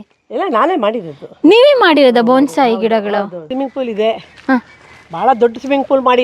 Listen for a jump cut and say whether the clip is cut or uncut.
cut